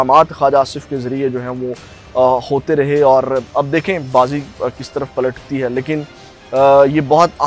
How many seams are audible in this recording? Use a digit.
0